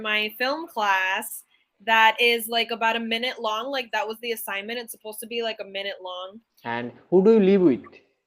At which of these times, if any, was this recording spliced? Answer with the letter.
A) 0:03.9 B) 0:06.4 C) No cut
B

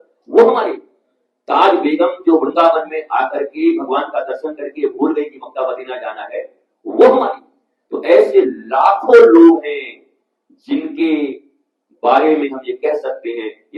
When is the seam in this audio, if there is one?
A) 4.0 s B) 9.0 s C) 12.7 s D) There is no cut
D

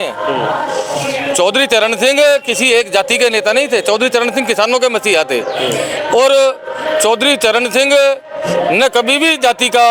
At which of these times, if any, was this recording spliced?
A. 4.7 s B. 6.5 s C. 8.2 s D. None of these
D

